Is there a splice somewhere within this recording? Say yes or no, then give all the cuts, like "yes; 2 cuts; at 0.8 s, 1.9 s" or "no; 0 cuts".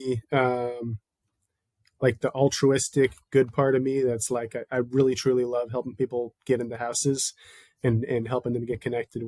no; 0 cuts